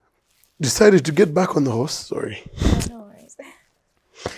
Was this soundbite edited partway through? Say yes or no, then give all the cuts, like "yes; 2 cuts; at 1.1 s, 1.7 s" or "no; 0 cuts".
no; 0 cuts